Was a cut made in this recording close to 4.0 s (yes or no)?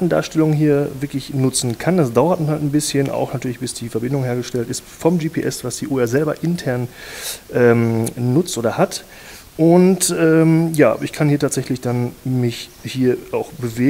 yes